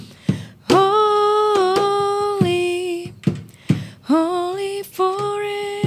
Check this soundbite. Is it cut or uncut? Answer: uncut